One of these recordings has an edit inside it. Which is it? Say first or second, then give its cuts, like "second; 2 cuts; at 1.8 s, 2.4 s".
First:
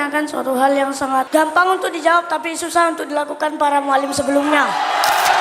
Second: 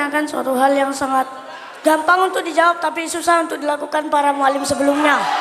first; 1 cut; at 1.3 s